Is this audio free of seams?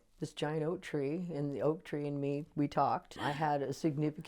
no; 1 cut; at 3.2 s

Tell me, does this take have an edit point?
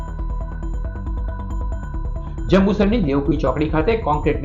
no; 0 cuts

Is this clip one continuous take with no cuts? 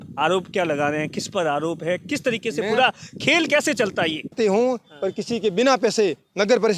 no; 1 cut; at 4.4 s

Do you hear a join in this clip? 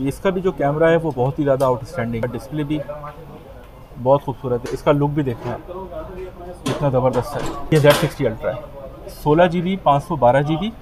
yes; 3 cuts; at 2.2 s, 4.6 s, 7.6 s

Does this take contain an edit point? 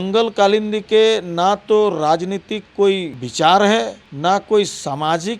yes; 2 cuts; at 3.2 s, 4.0 s

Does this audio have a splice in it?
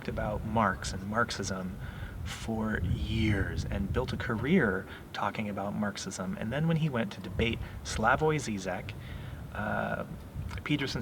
no; 0 cuts

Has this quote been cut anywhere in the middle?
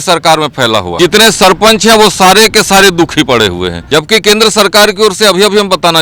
yes; 2 cuts; at 1.0 s, 3.8 s

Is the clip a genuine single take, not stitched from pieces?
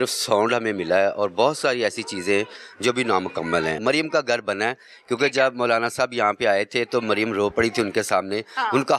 no; 1 cut; at 3.8 s

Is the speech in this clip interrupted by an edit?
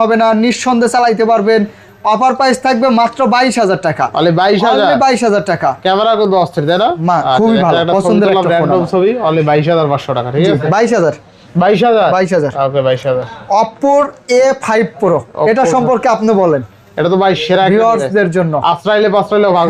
no; 0 cuts

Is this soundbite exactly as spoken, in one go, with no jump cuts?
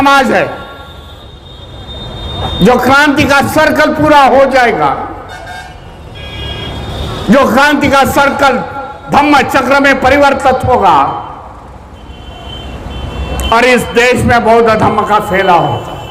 yes; 0 cuts

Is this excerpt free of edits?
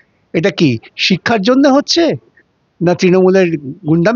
yes; 0 cuts

